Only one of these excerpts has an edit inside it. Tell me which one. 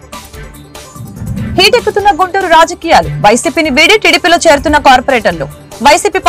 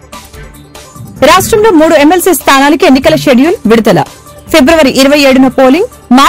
second; 1 cut; at 1.1 s

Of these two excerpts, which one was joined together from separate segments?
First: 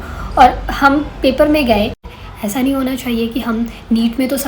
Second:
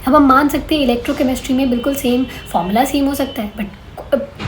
first; 1 cut; at 2.0 s

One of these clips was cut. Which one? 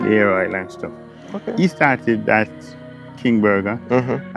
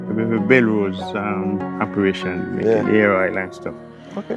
second; 1 cut; at 1.7 s

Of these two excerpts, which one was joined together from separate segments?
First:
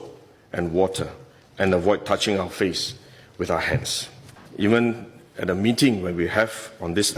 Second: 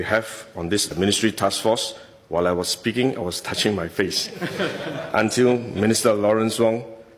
first; 1 cut; at 4.4 s

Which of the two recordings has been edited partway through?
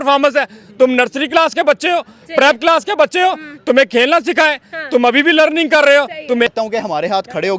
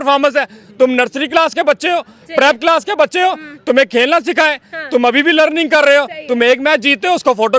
first; 1 cut; at 6.5 s

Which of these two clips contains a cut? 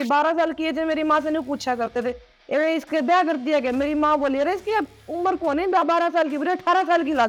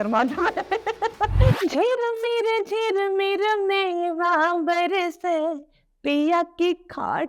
second; 1 cut; at 1.5 s

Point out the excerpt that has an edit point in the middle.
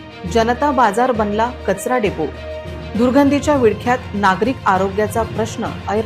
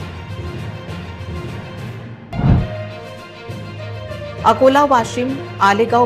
second; 1 cut; at 1.6 s

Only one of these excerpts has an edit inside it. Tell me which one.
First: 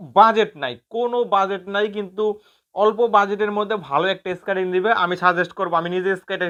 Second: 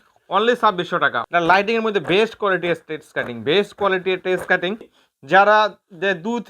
second; 2 cuts; at 1.2 s, 4.9 s

